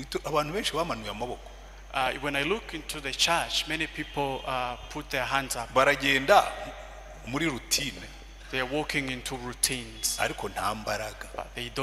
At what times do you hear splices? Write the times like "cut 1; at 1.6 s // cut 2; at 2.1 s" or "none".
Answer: none